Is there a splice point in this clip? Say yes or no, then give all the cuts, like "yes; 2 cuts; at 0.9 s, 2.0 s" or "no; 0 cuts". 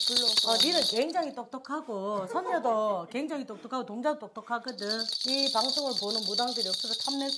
yes; 1 cut; at 5.1 s